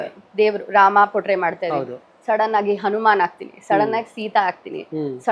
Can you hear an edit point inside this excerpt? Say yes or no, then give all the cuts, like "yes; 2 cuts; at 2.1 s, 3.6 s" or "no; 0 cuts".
no; 0 cuts